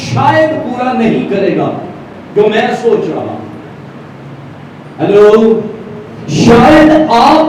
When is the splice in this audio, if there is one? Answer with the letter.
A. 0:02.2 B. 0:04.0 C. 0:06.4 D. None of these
D